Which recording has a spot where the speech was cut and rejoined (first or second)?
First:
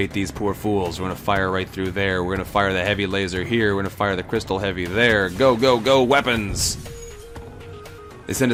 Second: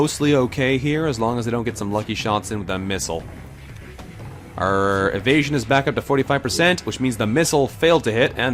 second